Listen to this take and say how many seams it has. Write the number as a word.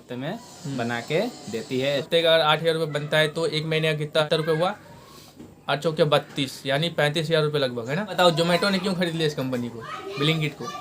three